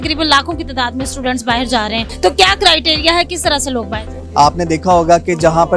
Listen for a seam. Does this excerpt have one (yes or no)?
yes